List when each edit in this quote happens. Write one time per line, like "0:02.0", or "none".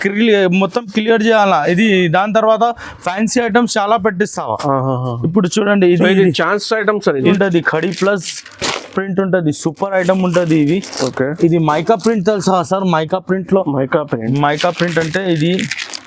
0:07.3